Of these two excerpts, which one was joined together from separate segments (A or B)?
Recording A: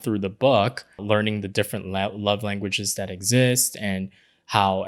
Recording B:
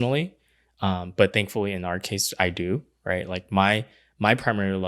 A